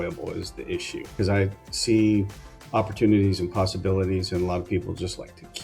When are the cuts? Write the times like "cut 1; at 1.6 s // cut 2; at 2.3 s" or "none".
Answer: cut 1; at 1.1 s